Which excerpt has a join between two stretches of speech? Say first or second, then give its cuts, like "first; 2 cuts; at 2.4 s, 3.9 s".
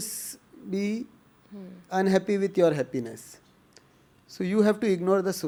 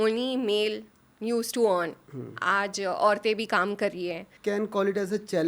second; 1 cut; at 4.3 s